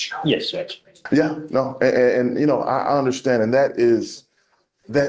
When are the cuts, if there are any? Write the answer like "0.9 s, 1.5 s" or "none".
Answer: 1.0 s